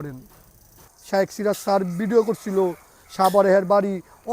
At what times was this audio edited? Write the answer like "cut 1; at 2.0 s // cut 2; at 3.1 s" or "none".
cut 1; at 0.9 s